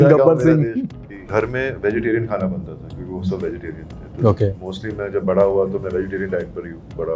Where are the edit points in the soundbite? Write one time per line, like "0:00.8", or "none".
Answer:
0:01.3